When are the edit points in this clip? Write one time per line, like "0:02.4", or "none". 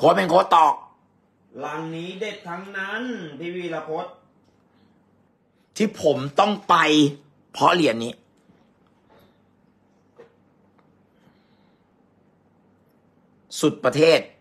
0:05.3
0:11.9